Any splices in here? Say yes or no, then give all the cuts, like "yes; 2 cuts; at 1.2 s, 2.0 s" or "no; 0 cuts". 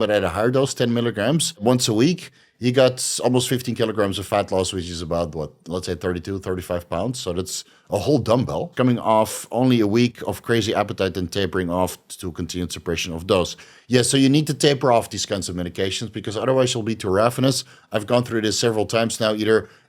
yes; 2 cuts; at 1.6 s, 8.7 s